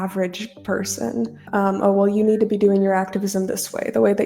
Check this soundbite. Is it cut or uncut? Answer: cut